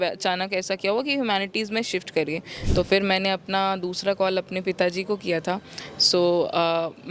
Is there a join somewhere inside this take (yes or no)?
yes